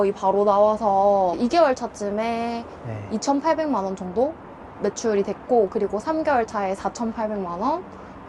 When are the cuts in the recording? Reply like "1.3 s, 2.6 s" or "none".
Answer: none